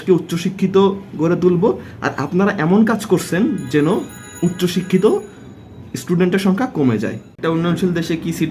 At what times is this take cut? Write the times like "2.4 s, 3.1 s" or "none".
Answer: 7.2 s